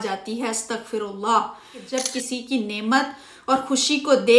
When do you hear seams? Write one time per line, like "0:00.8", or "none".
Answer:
0:01.9